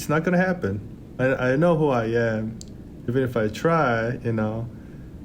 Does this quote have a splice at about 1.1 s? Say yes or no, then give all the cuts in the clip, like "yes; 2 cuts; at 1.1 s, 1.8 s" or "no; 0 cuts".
yes; 2 cuts; at 1.1 s, 3.1 s